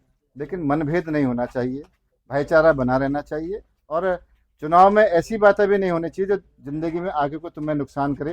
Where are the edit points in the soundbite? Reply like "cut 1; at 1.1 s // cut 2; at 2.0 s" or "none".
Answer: none